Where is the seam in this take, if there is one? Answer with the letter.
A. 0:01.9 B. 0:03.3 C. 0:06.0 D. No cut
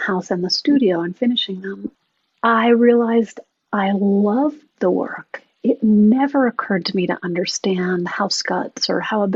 A